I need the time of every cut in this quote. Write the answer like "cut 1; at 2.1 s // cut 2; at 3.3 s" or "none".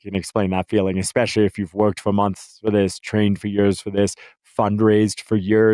none